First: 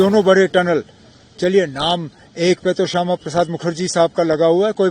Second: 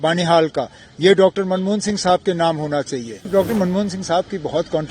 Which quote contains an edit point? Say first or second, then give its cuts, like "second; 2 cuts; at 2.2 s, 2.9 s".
second; 1 cut; at 3.3 s